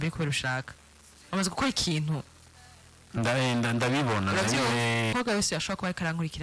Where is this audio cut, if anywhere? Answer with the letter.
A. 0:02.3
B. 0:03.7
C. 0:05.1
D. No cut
C